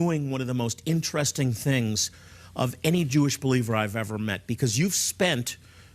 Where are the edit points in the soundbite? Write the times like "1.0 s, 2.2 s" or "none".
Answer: 5.0 s